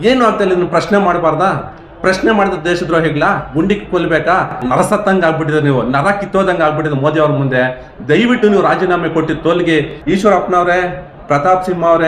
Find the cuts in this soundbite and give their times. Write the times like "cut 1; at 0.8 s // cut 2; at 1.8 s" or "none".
cut 1; at 4.6 s // cut 2; at 10.0 s